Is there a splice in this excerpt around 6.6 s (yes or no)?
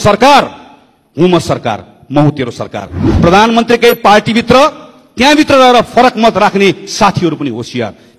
no